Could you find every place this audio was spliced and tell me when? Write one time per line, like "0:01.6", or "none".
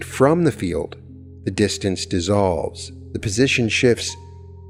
none